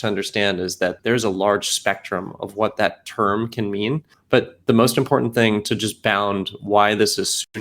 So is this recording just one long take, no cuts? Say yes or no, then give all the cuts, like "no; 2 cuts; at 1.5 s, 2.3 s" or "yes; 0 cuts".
no; 2 cuts; at 1.0 s, 4.1 s